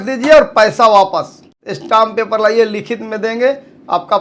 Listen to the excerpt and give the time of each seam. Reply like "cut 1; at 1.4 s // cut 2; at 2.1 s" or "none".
cut 1; at 1.4 s